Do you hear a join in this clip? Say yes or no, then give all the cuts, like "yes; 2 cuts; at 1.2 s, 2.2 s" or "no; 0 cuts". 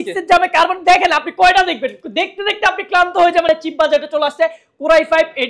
yes; 1 cut; at 3.5 s